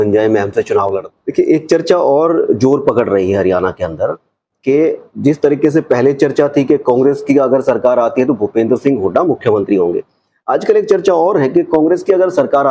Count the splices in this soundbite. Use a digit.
1